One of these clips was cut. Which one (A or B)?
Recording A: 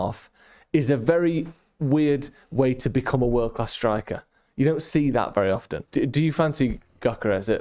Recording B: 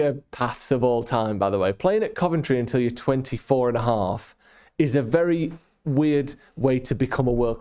A